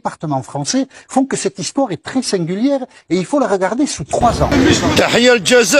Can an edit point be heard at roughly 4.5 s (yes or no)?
yes